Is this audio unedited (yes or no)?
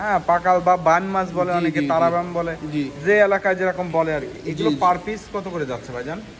yes